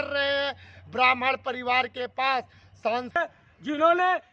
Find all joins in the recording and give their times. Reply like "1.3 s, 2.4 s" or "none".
3.2 s